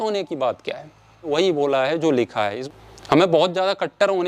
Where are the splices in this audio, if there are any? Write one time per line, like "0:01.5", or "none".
0:01.3
0:02.6